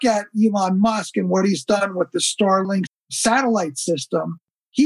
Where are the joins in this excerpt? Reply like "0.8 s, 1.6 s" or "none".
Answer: 1.8 s